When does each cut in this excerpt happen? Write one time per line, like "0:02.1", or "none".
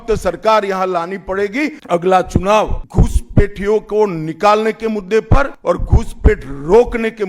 0:01.8
0:02.8
0:05.5